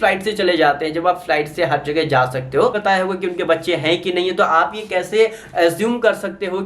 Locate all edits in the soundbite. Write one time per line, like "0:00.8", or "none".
0:02.7

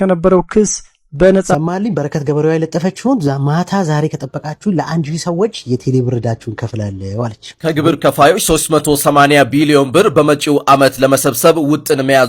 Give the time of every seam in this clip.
0:01.5
0:07.4

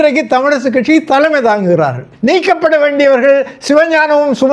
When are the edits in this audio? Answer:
0:02.0

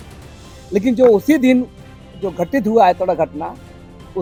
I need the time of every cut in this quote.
none

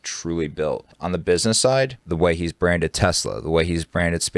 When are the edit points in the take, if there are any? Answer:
0:00.9
0:02.0

